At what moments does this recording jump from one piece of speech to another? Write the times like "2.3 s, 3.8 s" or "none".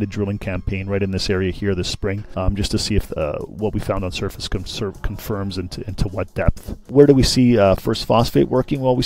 2.2 s, 6.7 s